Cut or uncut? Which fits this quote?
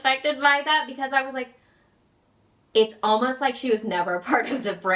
uncut